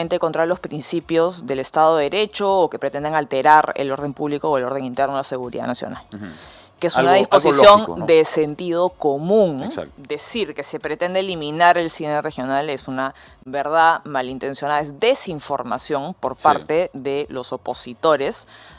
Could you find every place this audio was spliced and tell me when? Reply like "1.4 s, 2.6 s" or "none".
9.9 s